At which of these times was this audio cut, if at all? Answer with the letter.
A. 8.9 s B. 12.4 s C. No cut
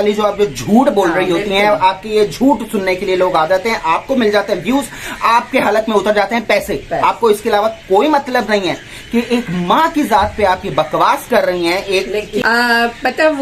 B